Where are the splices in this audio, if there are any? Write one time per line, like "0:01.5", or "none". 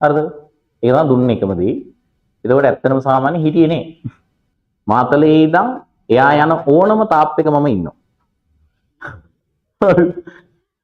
0:04.1